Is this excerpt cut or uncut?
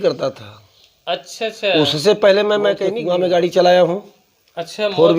cut